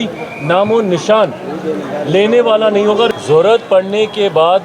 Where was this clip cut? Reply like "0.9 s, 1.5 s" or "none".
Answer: 3.1 s